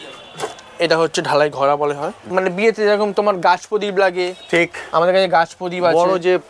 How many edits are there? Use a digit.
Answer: 1